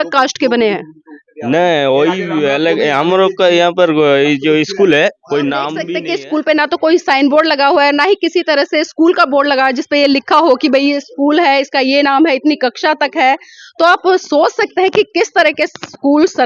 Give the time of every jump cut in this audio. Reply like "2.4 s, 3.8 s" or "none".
5.8 s